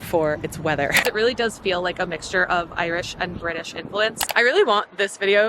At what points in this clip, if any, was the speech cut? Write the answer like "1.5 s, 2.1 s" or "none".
1.0 s, 4.2 s

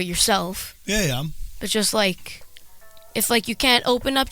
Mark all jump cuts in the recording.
none

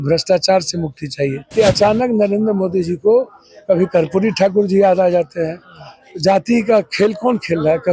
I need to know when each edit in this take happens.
1.4 s

